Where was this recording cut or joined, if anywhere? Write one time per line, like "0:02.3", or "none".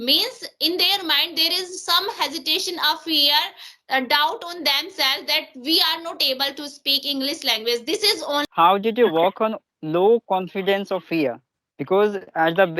0:08.5